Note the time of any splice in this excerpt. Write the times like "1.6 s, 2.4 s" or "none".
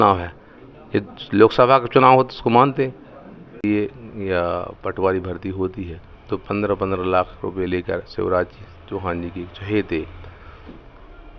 3.6 s